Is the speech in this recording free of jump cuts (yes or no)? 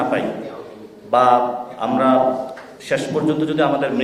yes